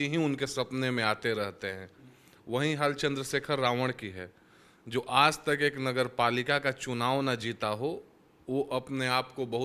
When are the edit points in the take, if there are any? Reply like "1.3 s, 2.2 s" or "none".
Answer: none